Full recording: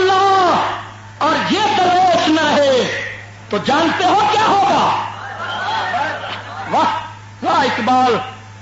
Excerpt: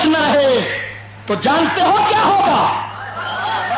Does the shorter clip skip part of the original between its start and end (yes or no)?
no